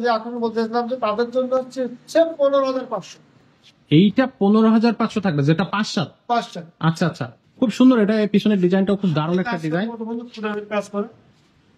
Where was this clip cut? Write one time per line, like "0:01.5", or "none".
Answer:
0:07.3